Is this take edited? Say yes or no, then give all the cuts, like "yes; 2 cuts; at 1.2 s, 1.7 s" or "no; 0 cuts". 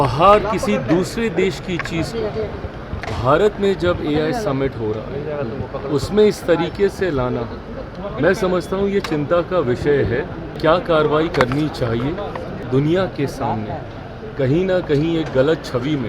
yes; 2 cuts; at 10.4 s, 12.5 s